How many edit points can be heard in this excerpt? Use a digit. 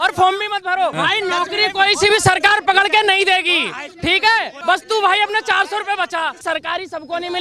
3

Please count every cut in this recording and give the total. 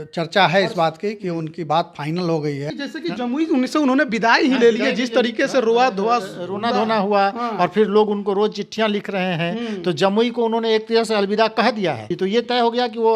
2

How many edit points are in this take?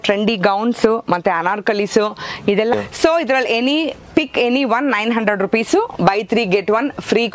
1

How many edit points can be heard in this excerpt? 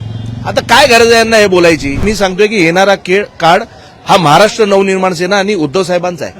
1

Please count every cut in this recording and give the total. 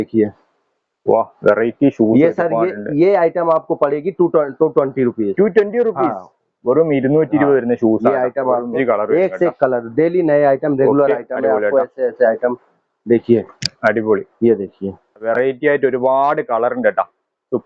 2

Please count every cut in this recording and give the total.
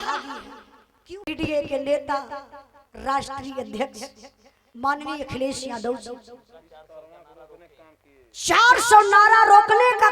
1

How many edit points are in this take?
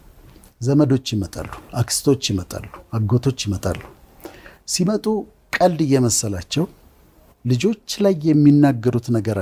0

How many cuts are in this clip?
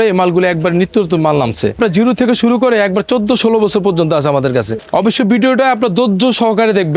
2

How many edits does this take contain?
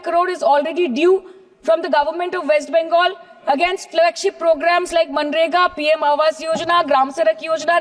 0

